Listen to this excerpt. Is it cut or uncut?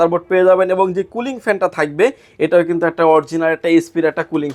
uncut